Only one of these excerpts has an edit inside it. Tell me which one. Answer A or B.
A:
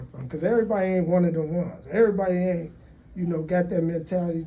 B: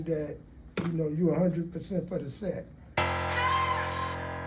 B